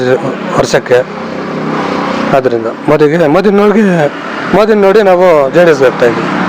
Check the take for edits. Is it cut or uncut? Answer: uncut